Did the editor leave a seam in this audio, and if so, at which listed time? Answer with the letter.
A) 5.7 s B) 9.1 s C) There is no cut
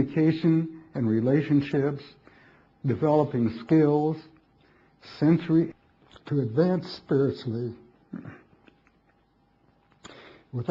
C